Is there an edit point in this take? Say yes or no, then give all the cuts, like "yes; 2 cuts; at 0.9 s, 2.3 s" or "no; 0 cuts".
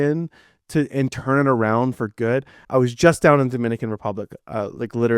yes; 1 cut; at 2.6 s